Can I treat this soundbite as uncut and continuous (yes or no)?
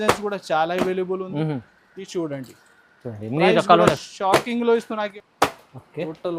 no